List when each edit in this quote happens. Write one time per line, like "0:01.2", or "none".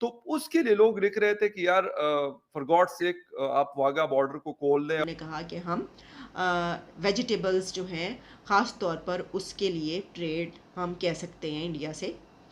0:05.0